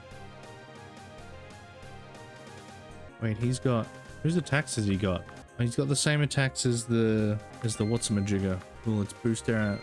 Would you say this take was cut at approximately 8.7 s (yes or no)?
yes